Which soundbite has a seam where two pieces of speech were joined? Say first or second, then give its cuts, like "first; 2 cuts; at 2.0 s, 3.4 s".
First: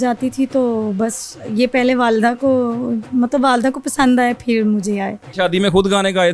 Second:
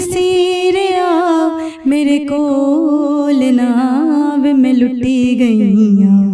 first; 1 cut; at 5.2 s